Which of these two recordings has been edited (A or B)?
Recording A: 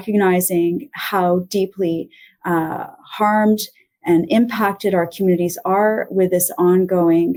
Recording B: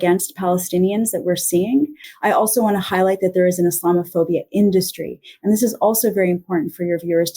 B